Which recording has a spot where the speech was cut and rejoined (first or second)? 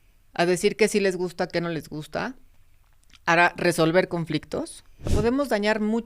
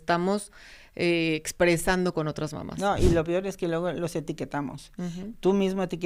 first